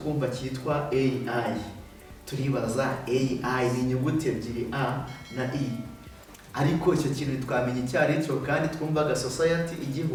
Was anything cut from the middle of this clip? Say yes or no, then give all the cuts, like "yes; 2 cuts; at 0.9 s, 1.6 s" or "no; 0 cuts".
no; 0 cuts